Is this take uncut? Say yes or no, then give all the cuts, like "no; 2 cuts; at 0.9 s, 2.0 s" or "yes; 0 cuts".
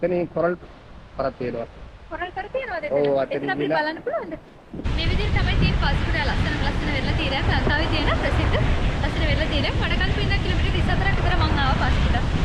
no; 1 cut; at 4.9 s